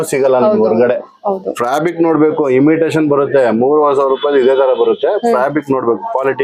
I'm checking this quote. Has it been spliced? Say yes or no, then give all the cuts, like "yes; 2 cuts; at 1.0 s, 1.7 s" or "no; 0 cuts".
no; 0 cuts